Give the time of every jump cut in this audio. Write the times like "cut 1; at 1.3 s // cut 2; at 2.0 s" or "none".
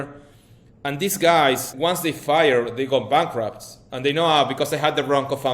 cut 1; at 1.7 s